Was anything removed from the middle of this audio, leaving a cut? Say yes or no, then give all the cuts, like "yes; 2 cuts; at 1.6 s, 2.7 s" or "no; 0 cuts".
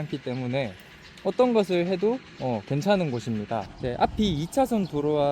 yes; 1 cut; at 3.7 s